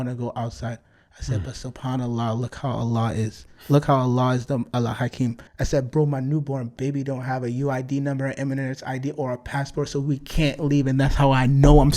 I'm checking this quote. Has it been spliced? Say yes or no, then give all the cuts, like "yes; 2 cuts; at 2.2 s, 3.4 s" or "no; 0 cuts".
yes; 1 cut; at 5.5 s